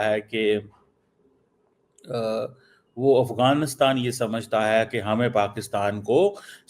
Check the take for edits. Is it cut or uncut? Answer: uncut